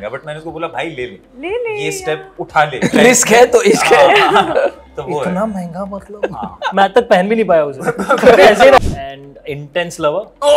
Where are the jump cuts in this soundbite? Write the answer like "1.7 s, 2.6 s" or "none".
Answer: 8.8 s